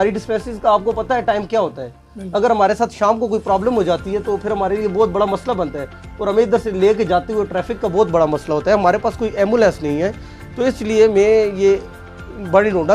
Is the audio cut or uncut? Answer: uncut